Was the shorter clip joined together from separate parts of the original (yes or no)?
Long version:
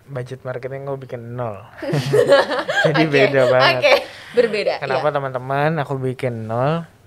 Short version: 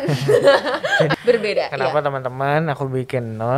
yes